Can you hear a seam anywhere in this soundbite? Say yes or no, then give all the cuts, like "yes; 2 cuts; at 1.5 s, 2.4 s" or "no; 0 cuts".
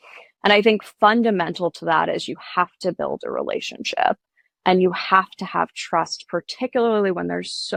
no; 0 cuts